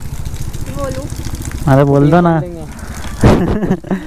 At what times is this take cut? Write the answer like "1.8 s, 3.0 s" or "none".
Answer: none